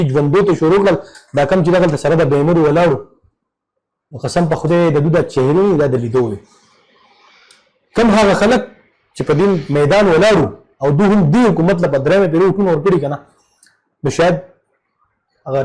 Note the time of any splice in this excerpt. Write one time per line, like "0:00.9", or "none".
none